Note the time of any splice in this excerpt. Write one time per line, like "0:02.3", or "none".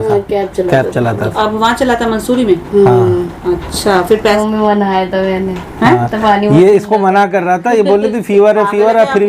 0:04.4